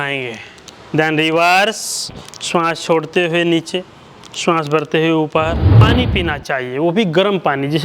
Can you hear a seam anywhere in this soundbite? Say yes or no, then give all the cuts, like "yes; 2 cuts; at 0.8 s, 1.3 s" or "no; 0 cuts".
yes; 1 cut; at 5.8 s